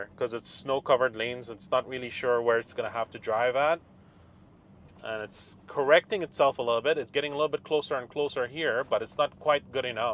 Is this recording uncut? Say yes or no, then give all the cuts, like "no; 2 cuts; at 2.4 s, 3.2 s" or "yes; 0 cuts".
yes; 0 cuts